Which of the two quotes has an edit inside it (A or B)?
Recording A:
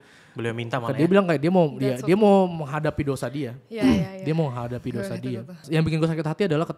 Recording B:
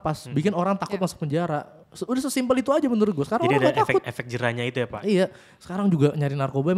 A